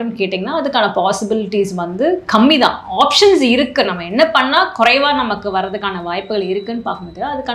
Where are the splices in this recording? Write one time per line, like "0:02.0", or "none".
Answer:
none